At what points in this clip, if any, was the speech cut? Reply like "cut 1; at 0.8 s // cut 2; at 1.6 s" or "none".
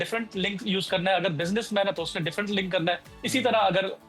none